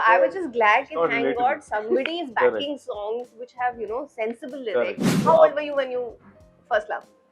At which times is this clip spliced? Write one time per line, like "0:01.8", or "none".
0:05.1